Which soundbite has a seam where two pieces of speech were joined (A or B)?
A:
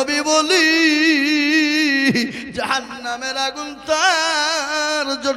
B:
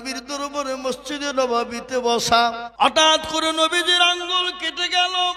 B